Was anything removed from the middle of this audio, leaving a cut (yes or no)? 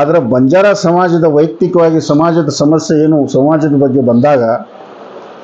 no